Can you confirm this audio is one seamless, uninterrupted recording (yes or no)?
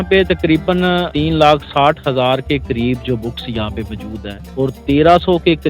no